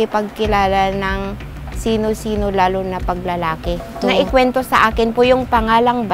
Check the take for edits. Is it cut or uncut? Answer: cut